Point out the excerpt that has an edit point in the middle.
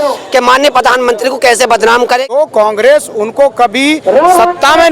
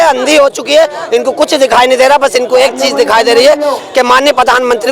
first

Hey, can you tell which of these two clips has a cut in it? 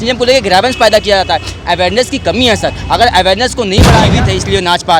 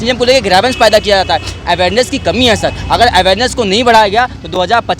first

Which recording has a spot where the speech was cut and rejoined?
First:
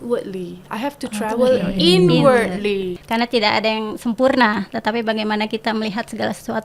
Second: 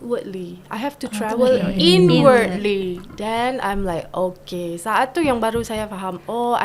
first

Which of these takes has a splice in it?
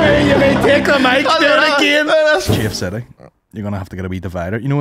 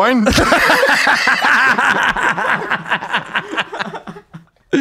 first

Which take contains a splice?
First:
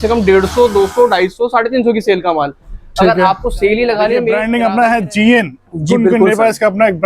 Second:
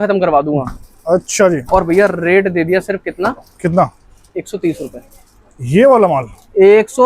first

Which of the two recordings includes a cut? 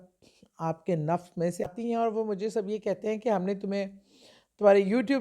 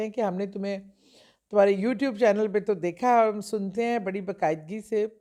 first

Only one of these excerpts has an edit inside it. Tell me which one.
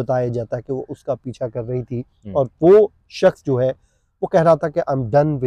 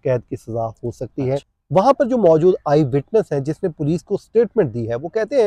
second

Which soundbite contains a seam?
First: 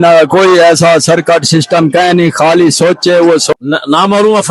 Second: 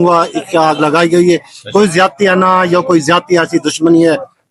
first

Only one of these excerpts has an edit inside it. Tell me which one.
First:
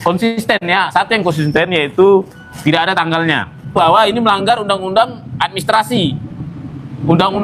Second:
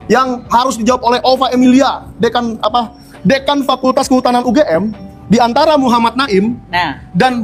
first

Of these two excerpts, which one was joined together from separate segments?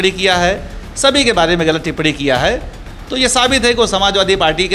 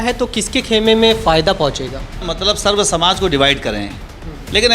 second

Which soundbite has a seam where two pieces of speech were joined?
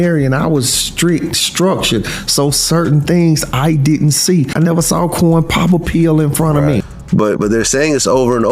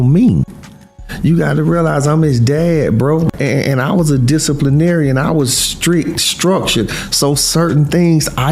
first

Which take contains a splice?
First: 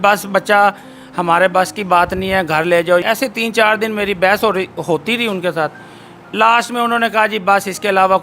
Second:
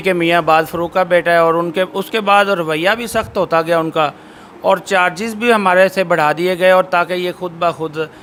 first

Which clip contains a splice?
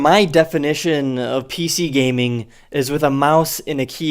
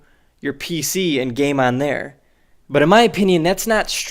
first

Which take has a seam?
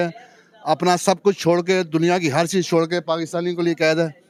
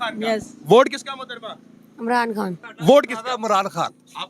second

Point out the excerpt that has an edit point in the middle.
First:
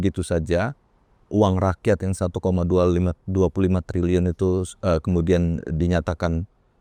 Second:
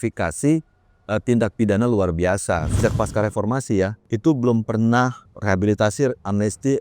second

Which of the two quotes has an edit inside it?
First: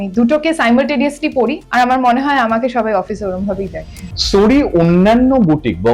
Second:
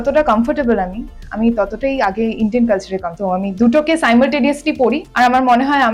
first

